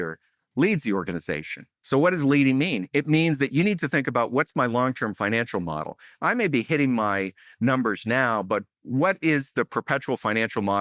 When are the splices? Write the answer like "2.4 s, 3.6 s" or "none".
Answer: none